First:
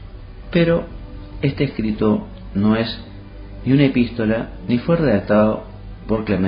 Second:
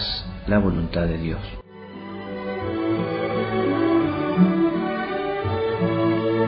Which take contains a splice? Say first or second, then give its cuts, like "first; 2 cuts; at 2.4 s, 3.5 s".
first; 1 cut; at 4.9 s